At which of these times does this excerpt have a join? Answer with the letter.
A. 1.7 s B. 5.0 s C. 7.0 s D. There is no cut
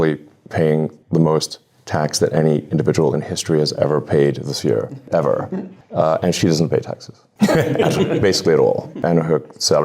B